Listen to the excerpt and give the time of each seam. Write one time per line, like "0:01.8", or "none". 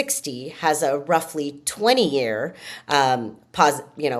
none